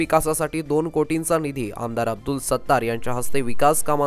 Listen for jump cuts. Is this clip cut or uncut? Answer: uncut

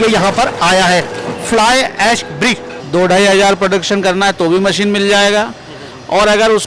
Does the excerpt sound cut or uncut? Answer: cut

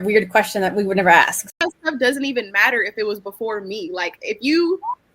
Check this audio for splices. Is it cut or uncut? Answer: cut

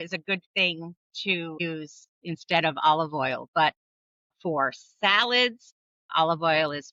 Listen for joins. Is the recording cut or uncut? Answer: uncut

